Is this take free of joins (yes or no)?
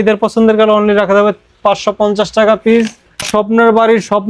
no